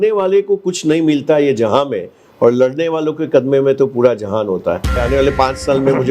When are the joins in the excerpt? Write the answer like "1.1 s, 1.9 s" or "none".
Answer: 4.9 s